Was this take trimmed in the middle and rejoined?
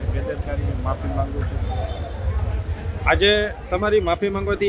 no; 0 cuts

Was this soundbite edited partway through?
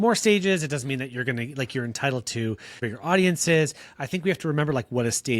yes; 1 cut; at 2.9 s

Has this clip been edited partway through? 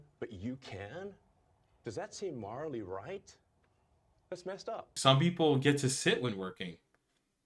yes; 1 cut; at 5.0 s

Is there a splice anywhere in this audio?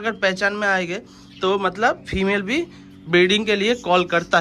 no; 0 cuts

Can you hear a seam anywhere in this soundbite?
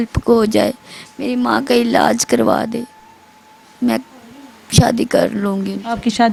no; 0 cuts

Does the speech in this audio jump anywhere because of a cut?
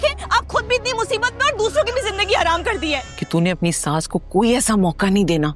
yes; 1 cut; at 3.1 s

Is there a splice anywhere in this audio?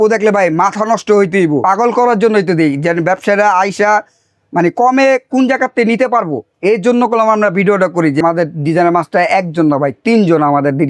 yes; 2 cuts; at 1.6 s, 8.2 s

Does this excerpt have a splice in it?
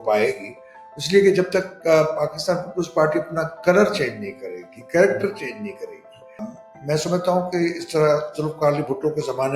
yes; 1 cut; at 6.5 s

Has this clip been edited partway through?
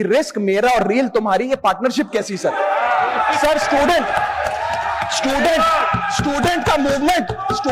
no; 0 cuts

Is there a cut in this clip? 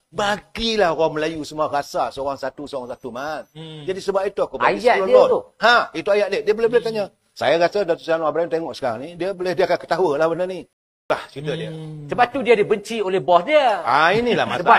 yes; 1 cut; at 11.0 s

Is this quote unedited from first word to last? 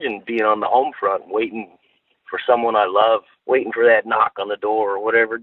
no; 1 cut; at 3.3 s

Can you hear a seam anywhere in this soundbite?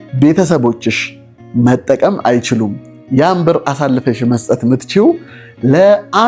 no; 0 cuts

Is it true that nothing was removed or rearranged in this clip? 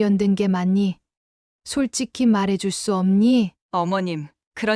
no; 1 cut; at 3.6 s

